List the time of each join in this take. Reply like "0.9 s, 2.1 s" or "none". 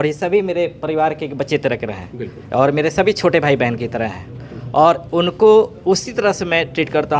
none